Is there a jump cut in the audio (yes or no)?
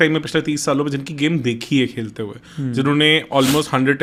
no